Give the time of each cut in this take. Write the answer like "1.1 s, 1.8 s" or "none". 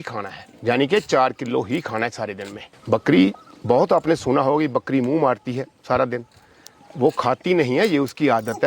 none